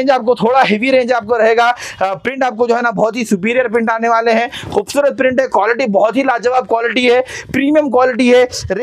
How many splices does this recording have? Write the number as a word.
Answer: zero